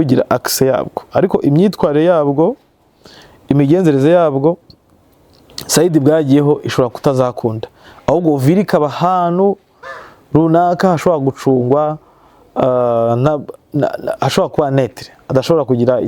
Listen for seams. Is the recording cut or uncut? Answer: uncut